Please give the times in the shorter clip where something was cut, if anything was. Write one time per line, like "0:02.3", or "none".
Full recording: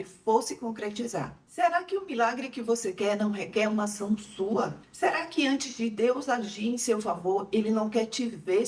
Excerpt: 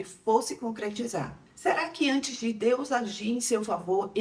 0:01.4